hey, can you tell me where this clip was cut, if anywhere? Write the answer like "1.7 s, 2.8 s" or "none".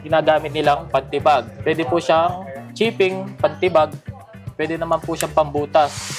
1.5 s